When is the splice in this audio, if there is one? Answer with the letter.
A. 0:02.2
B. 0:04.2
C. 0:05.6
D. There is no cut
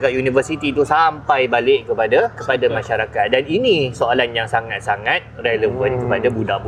D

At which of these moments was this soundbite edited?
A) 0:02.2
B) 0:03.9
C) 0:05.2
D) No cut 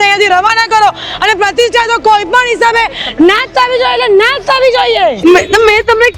C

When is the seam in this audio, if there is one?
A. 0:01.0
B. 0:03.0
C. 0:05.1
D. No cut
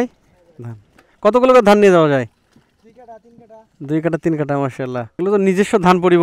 C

